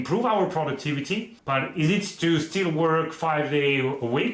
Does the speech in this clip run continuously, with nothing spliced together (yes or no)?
no